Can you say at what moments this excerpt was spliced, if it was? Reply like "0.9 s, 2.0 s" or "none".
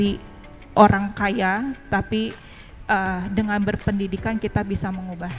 none